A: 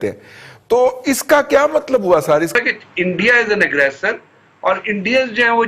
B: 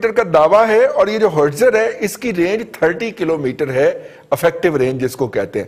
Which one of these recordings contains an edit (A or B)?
A